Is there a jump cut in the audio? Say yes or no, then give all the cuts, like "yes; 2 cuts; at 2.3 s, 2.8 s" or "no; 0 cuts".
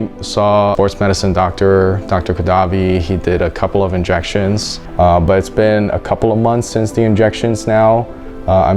yes; 2 cuts; at 0.8 s, 4.7 s